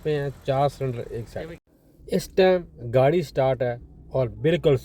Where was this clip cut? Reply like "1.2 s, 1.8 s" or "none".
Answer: none